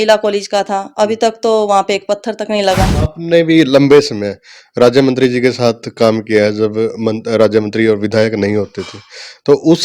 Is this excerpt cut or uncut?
cut